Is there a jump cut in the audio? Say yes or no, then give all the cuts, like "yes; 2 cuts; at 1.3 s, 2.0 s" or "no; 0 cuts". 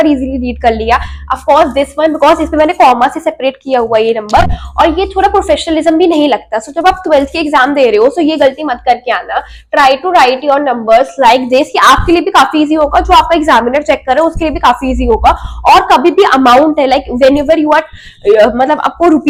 no; 0 cuts